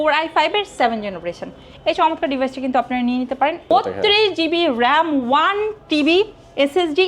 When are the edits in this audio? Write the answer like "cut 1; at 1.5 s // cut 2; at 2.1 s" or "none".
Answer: cut 1; at 3.7 s